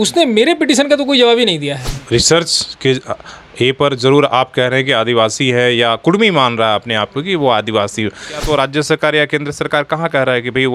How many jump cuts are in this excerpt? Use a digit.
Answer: 2